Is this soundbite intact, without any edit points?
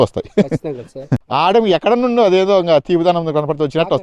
no; 1 cut; at 1.1 s

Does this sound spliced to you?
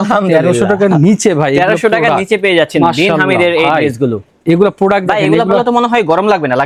no; 0 cuts

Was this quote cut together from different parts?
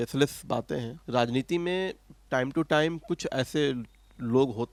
no; 0 cuts

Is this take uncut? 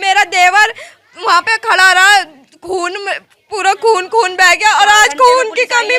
yes; 0 cuts

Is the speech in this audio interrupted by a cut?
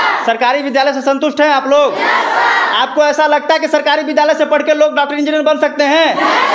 no; 0 cuts

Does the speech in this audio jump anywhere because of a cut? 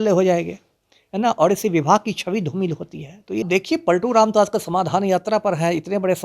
yes; 1 cut; at 3.4 s

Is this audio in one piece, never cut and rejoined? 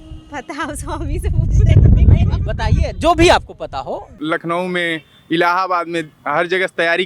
no; 1 cut; at 4.1 s

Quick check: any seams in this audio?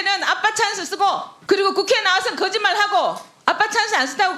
yes; 1 cut; at 1.3 s

